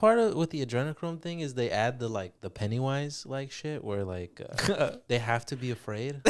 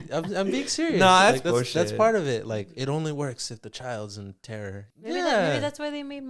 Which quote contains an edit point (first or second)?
second